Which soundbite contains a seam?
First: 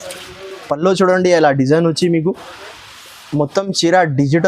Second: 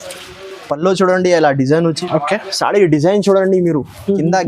second; 1 cut; at 2.0 s

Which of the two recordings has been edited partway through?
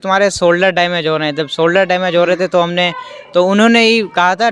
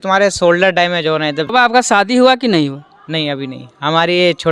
second; 1 cut; at 1.5 s

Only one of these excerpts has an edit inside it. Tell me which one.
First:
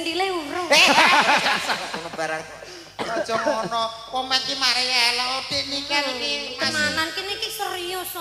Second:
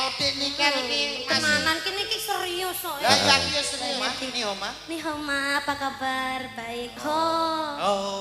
second; 1 cut; at 4.0 s

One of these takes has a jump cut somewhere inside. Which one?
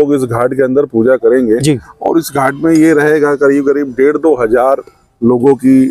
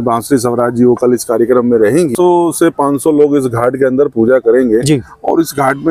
second; 1 cut; at 2.1 s

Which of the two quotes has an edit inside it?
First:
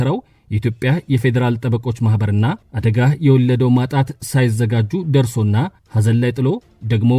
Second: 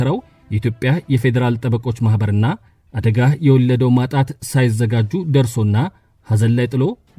first; 2 cuts; at 2.7 s, 5.8 s

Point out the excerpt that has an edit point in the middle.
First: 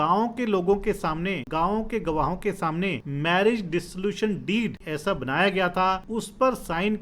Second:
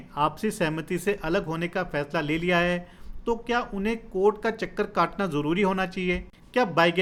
first; 4 cuts; at 1.4 s, 3.1 s, 4.9 s, 6.0 s

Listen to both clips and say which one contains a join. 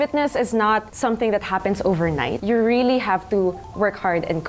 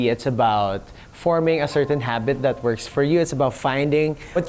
first; 2 cuts; at 0.9 s, 2.4 s

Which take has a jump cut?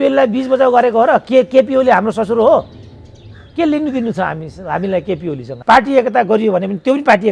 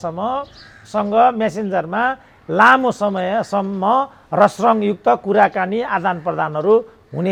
first; 1 cut; at 5.5 s

